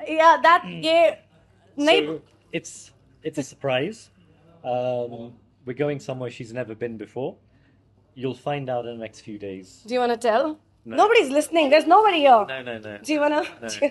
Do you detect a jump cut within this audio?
no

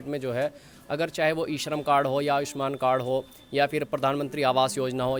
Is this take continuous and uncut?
yes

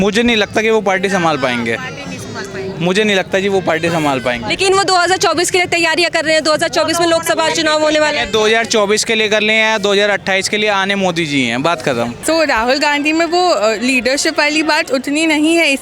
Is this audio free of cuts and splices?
no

